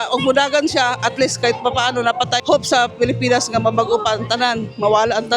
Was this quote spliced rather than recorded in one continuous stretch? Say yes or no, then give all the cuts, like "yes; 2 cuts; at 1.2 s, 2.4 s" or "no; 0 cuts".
yes; 1 cut; at 2.4 s